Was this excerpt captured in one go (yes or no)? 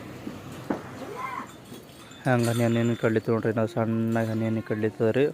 yes